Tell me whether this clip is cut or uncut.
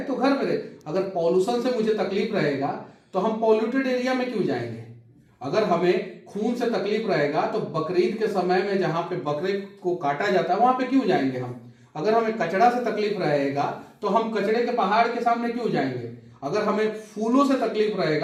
uncut